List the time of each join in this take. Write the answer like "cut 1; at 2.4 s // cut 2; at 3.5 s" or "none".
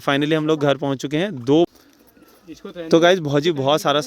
cut 1; at 1.7 s